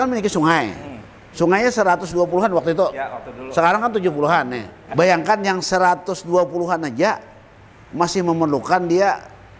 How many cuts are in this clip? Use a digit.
1